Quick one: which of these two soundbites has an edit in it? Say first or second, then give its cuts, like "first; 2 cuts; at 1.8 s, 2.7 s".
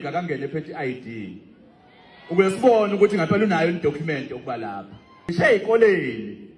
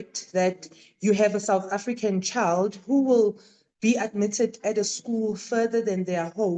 first; 1 cut; at 5.3 s